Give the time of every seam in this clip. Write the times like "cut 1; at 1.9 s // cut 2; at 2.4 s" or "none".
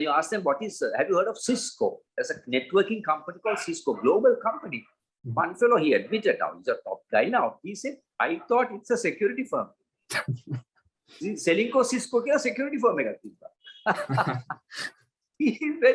none

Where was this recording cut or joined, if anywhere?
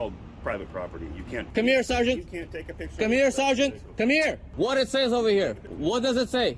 cut 1; at 1.5 s // cut 2; at 4.4 s // cut 3; at 5.7 s

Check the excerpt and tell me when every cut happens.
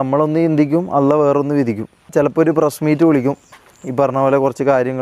cut 1; at 2.1 s

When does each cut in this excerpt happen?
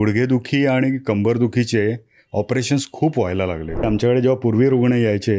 cut 1; at 3.8 s

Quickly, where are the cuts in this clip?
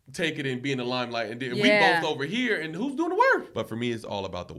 cut 1; at 3.5 s

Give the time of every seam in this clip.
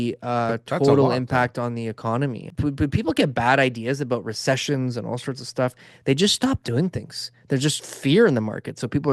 cut 1; at 2.5 s

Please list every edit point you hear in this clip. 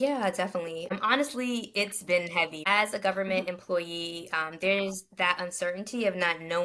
cut 1; at 0.9 s // cut 2; at 2.6 s

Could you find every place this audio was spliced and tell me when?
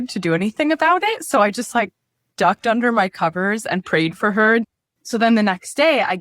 cut 1; at 4.7 s

